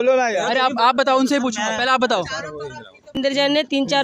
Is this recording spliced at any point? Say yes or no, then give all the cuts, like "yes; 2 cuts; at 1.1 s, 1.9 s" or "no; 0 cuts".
yes; 1 cut; at 3.1 s